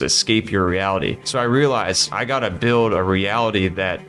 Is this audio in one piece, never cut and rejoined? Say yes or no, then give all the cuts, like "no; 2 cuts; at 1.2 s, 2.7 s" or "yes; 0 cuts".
no; 2 cuts; at 1.2 s, 2.1 s